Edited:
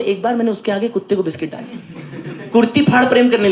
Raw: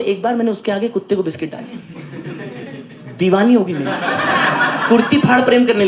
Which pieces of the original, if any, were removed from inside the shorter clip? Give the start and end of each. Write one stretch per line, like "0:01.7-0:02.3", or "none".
0:02.4-0:04.8